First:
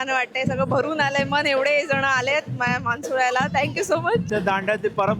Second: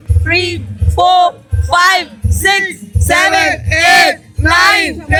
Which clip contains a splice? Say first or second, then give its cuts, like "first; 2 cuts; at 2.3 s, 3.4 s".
first; 1 cut; at 4.3 s